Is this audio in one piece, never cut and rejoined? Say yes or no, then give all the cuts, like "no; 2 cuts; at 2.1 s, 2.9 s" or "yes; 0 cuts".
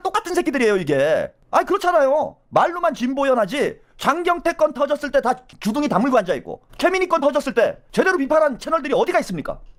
yes; 0 cuts